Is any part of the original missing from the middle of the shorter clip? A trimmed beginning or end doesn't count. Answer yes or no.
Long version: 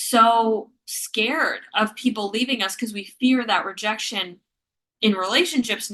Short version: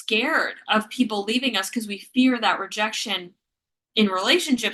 no